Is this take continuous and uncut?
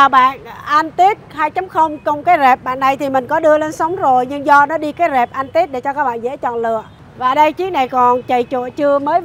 no; 1 cut; at 7.0 s

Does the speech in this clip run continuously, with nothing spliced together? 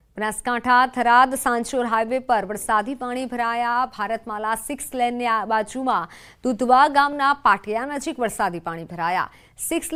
yes; 0 cuts

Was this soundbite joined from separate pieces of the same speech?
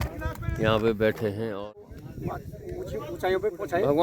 yes; 1 cut; at 1.6 s

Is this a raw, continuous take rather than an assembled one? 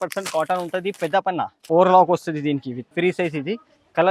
no; 2 cuts; at 1.6 s, 2.8 s

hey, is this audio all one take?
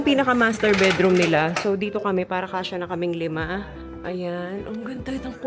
yes; 0 cuts

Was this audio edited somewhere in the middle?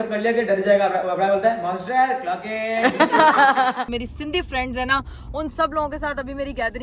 yes; 1 cut; at 3.9 s

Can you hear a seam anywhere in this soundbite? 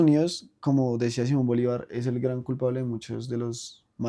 no; 0 cuts

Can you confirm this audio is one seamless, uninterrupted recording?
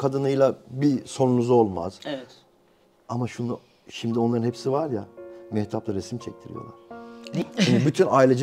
yes; 0 cuts

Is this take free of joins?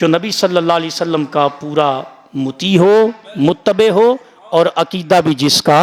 yes; 0 cuts

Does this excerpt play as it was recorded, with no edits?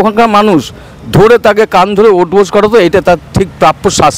yes; 0 cuts

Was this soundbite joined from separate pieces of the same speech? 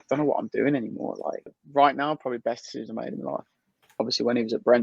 yes; 2 cuts; at 1.6 s, 3.9 s

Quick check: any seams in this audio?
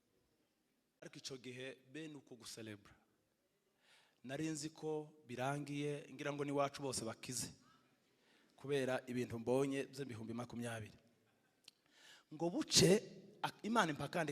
yes; 1 cut; at 1.0 s

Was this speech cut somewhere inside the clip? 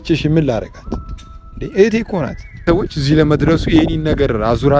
yes; 1 cut; at 2.6 s

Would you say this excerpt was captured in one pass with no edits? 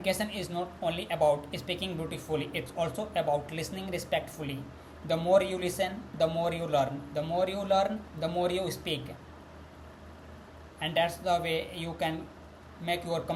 yes; 0 cuts

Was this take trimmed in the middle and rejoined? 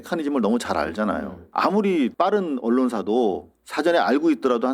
yes; 2 cuts; at 1.4 s, 2.1 s

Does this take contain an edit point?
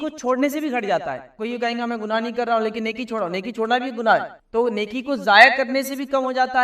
no; 0 cuts

